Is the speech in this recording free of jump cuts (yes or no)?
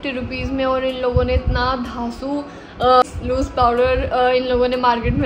no